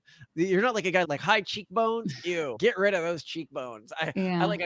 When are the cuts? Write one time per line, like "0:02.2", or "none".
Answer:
0:01.1